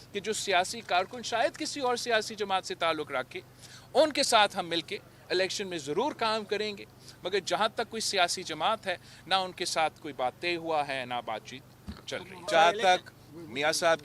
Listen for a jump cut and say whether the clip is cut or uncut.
cut